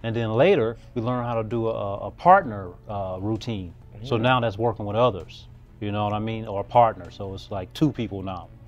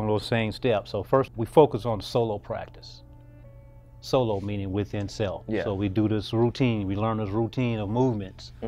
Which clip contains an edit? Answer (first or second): second